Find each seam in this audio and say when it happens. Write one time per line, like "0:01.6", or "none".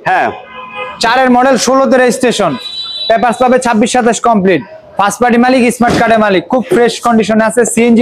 none